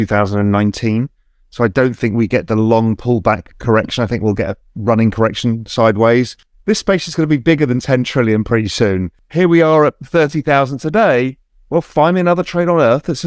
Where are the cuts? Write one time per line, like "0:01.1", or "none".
0:06.5
0:09.2